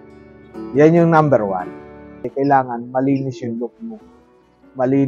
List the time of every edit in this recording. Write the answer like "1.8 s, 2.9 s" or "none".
2.3 s